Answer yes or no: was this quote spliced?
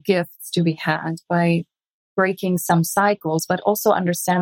yes